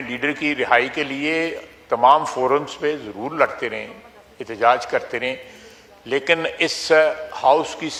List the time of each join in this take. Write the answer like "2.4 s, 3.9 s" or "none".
none